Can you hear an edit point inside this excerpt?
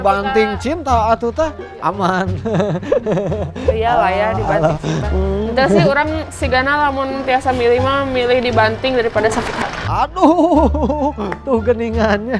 no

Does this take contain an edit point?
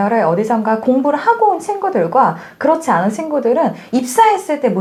no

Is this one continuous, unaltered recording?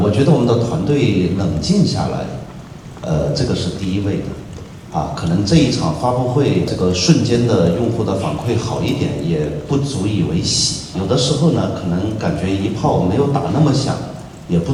yes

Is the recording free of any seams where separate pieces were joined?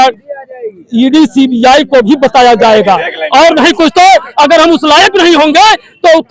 yes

